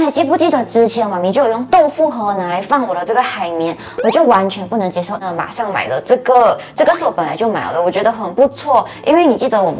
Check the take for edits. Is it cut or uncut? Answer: uncut